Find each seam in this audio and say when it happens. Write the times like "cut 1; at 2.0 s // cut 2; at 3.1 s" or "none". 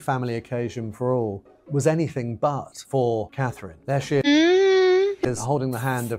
cut 1; at 4.2 s // cut 2; at 5.3 s